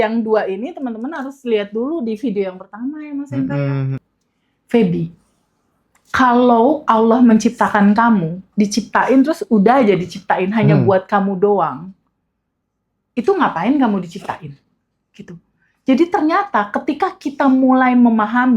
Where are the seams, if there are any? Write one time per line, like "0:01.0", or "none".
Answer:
0:04.0